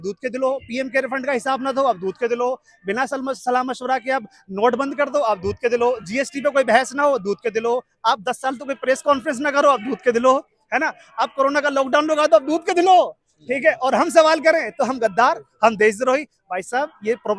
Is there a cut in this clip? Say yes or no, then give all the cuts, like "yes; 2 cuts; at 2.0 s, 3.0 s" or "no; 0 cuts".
no; 0 cuts